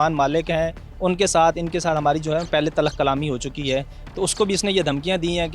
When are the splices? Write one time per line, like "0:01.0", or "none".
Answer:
none